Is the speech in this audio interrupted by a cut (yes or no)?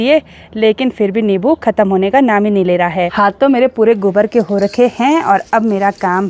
yes